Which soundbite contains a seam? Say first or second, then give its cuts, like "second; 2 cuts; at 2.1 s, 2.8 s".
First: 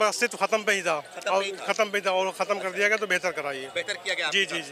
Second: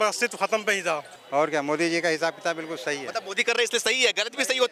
second; 1 cut; at 1.1 s